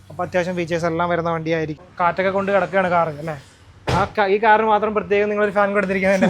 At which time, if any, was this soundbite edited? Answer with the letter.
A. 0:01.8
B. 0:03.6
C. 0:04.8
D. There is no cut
A